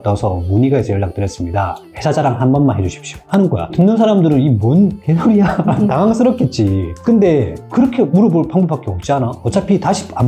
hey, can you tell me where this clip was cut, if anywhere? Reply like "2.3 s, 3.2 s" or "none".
none